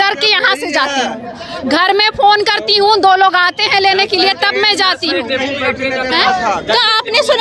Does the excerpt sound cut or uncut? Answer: uncut